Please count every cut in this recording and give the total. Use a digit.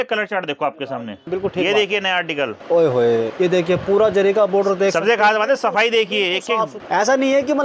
4